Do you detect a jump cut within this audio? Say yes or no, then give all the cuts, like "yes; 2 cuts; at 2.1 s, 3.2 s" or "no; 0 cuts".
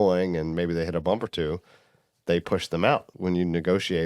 yes; 1 cut; at 3.1 s